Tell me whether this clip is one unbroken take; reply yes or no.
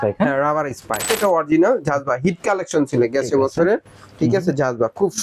no